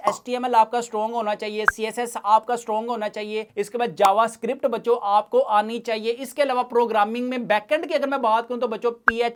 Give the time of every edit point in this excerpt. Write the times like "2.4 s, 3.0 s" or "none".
none